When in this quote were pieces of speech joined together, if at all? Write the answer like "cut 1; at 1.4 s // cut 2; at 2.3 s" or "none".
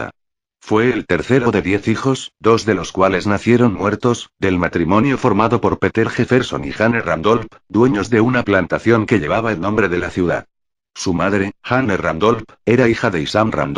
none